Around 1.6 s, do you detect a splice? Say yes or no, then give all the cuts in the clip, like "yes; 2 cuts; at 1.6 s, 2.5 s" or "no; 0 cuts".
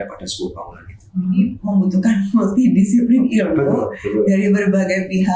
yes; 1 cut; at 1.6 s